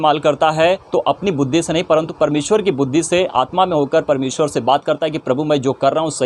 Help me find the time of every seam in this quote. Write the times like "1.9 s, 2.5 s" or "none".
2.1 s